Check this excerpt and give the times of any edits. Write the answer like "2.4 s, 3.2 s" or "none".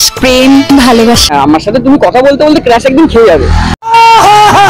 1.2 s